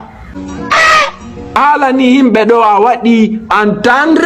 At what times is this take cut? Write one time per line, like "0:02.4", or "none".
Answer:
0:01.6